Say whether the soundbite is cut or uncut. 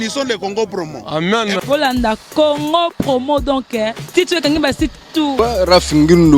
cut